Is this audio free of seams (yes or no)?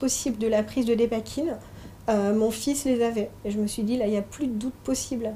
no